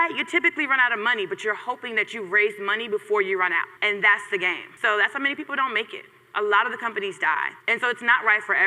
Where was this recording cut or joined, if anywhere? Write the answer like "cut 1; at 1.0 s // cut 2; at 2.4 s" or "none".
cut 1; at 3.7 s // cut 2; at 4.7 s // cut 3; at 7.6 s